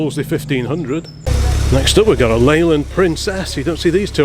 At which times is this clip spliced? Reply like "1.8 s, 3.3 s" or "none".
1.2 s

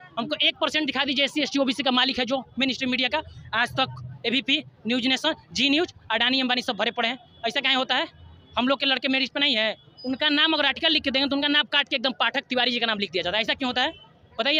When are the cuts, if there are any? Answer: none

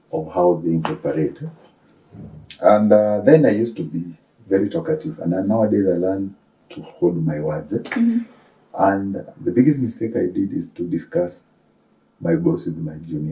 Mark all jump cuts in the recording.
none

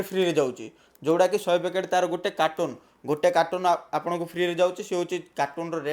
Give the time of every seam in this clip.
none

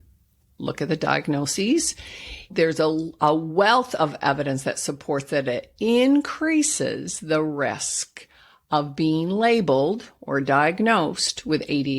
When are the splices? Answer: 2.5 s

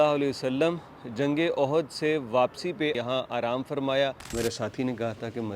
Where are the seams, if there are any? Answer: 3.0 s, 4.2 s

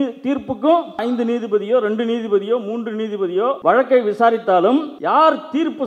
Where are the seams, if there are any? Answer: 3.6 s, 4.9 s

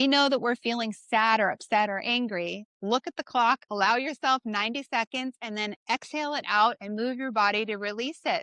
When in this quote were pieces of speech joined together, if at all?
none

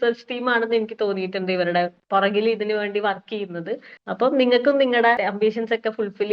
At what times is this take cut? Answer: 5.2 s

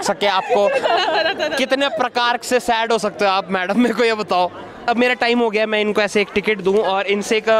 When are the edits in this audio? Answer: none

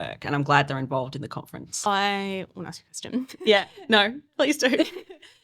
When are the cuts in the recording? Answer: 1.9 s

